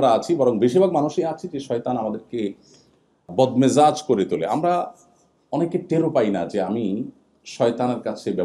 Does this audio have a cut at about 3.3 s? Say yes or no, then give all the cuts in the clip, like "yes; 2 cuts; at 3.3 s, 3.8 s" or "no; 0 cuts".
yes; 1 cut; at 3.3 s